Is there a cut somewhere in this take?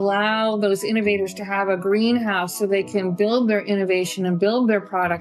no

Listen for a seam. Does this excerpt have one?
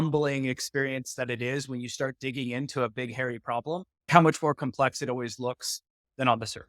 yes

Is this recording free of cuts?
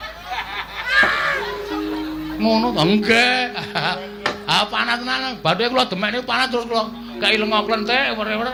yes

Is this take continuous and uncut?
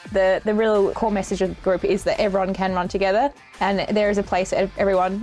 no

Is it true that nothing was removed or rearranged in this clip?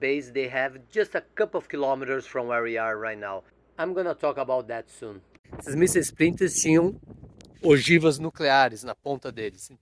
yes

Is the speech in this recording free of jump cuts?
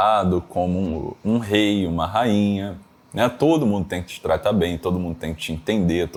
yes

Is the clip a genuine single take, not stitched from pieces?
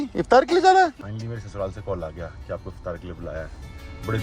no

